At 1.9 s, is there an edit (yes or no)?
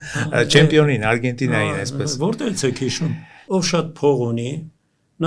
no